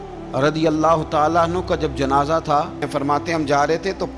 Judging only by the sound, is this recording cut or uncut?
cut